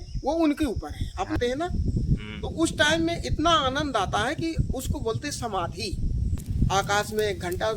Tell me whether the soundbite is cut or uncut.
cut